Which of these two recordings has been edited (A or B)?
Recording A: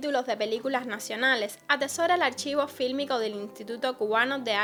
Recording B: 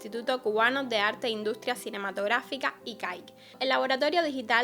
B